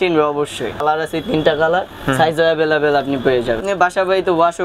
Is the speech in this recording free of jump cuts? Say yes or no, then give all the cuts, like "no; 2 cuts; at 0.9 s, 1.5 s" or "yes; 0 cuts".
no; 2 cuts; at 0.8 s, 3.6 s